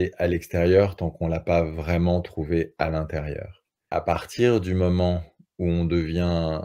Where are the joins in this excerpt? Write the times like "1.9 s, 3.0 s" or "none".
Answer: 3.8 s